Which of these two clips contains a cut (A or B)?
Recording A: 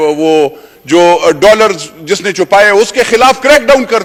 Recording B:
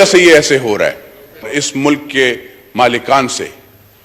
B